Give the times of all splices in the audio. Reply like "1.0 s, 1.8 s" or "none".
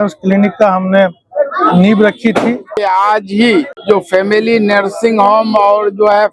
2.8 s, 3.7 s